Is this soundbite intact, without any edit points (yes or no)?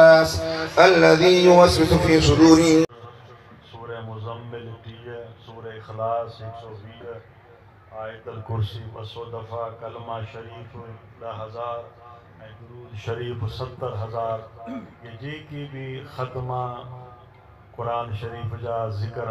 yes